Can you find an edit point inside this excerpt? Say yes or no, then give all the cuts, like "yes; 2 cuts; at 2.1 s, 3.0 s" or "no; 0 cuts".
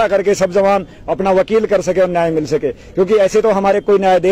no; 0 cuts